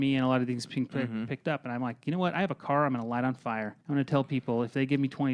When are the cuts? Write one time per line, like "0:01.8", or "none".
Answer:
0:03.7